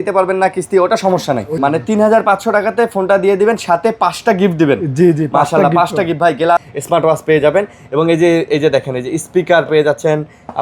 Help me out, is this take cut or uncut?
cut